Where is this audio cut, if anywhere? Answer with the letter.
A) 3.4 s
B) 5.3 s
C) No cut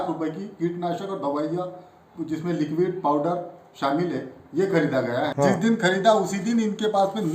B